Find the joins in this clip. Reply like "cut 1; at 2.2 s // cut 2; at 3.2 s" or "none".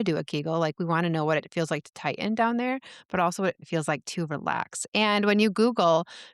cut 1; at 3.6 s